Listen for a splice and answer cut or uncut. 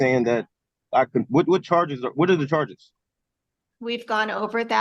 uncut